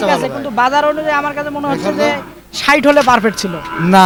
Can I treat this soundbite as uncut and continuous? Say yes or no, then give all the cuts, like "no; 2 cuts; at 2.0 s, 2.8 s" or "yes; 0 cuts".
yes; 0 cuts